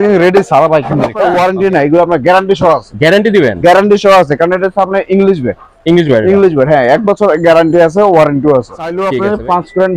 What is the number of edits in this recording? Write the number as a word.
two